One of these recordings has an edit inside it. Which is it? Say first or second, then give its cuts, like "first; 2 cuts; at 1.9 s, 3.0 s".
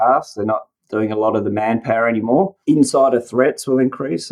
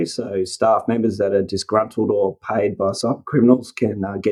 first; 1 cut; at 2.6 s